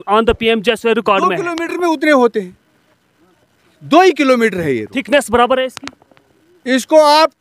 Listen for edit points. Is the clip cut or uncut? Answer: uncut